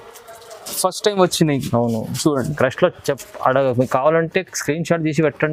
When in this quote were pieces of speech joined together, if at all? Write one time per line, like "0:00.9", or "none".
none